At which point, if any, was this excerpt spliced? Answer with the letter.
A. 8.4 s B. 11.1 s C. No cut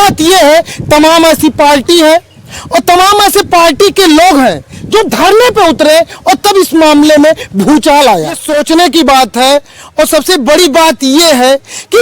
A